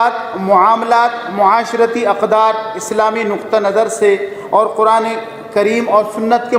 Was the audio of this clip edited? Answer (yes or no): no